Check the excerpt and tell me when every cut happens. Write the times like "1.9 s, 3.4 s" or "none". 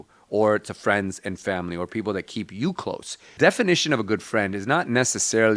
3.3 s